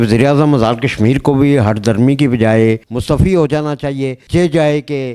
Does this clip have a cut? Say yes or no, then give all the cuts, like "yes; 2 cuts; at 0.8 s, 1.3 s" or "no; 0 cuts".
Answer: yes; 1 cut; at 2.8 s